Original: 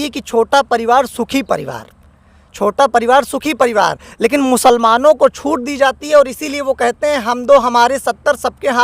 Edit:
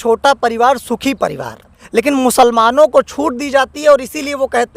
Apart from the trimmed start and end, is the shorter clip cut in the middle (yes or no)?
yes